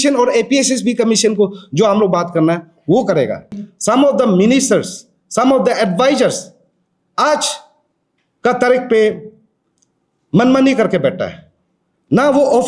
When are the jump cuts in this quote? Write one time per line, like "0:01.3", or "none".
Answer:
0:03.6